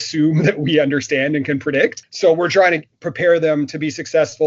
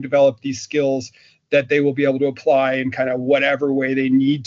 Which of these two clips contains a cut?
first; 1 cut; at 2.1 s

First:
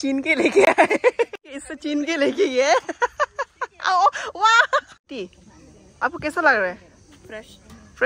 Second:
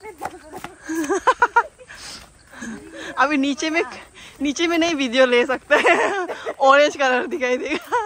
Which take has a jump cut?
first; 2 cuts; at 1.4 s, 5.0 s

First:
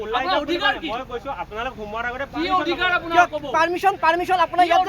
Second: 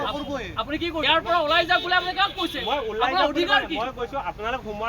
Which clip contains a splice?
second; 1 cut; at 1.0 s

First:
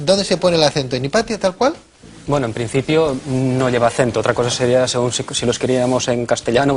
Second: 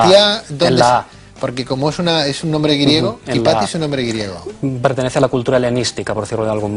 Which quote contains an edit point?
first; 1 cut; at 2.5 s

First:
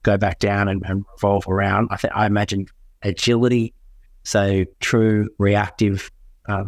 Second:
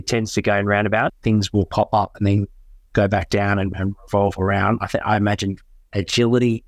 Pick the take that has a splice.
second; 1 cut; at 1.2 s

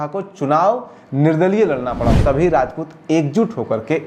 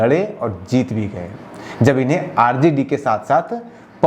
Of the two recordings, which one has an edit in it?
first; 1 cut; at 2.2 s

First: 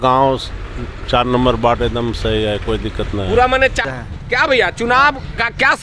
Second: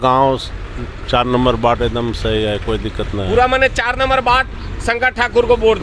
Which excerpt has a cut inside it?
first; 1 cut; at 3.8 s

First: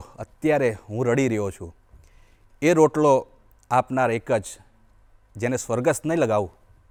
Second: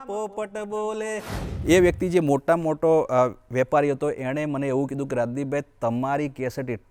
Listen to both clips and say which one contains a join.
second; 1 cut; at 1.3 s

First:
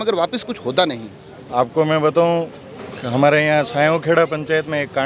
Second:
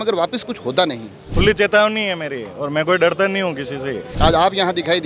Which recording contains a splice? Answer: second; 2 cuts; at 1.3 s, 4.0 s

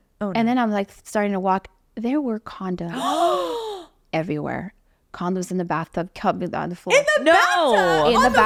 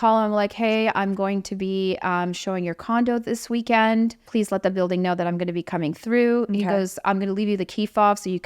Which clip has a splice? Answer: second; 1 cut; at 4.2 s

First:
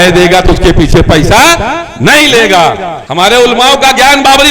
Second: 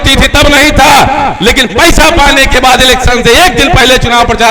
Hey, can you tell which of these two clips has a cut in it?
first; 1 cut; at 3.0 s

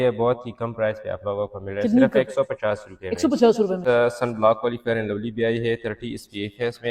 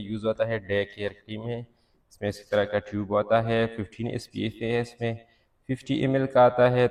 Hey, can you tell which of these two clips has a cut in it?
first; 1 cut; at 3.8 s

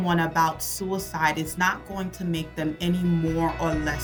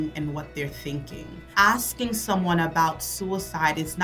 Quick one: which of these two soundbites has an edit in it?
second; 1 cut; at 1.5 s

